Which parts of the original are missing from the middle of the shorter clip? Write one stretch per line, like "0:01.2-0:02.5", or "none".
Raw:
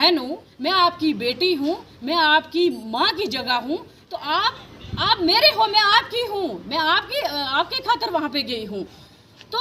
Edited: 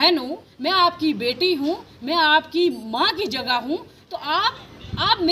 none